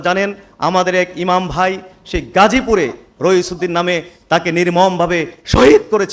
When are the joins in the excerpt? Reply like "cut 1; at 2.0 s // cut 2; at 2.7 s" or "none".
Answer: none